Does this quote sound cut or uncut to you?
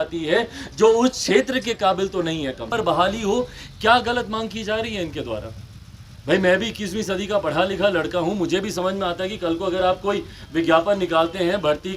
cut